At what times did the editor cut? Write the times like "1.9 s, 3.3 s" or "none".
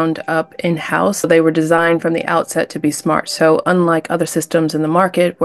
1.3 s